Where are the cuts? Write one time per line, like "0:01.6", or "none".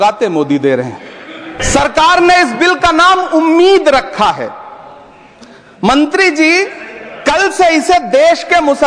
0:01.6